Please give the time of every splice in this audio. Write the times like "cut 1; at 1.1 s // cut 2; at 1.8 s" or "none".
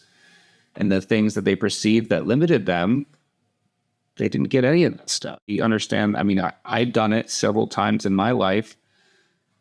cut 1; at 5.5 s

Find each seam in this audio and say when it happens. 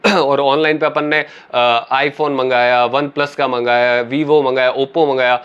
none

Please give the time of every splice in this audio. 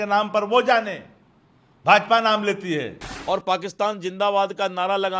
cut 1; at 3.0 s

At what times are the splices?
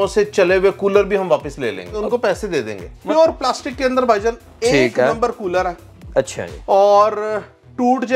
cut 1; at 1.9 s // cut 2; at 2.9 s

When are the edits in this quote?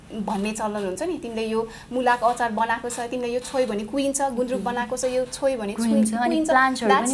none

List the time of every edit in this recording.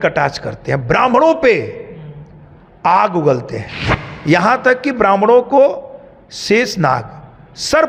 none

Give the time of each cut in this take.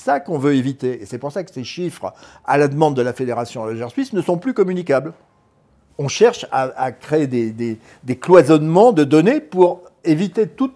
none

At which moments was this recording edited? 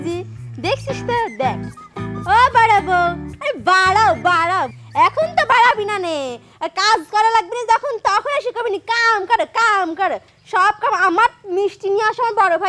cut 1; at 4.7 s

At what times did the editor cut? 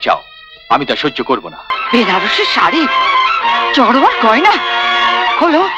cut 1; at 1.8 s

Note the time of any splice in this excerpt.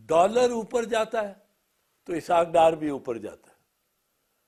none

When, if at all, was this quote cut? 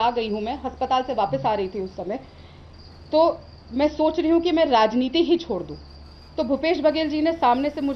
none

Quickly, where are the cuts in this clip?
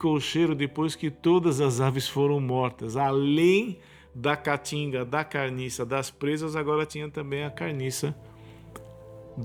none

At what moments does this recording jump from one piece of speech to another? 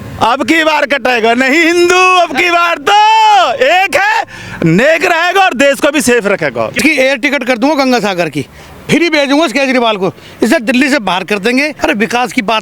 cut 1; at 6.8 s // cut 2; at 11.7 s

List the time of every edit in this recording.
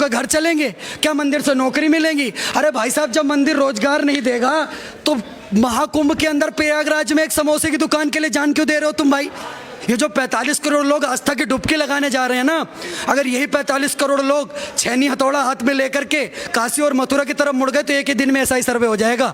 cut 1; at 9.7 s

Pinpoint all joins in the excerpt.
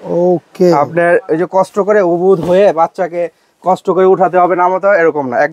none

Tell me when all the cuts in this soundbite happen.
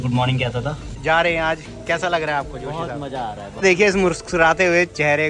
cut 1; at 1.0 s // cut 2; at 3.5 s

